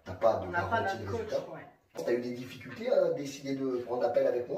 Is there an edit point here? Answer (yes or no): yes